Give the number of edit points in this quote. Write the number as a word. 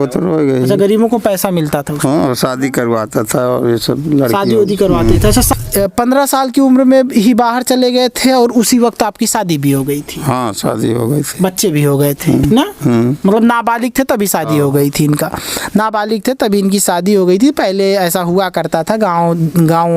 one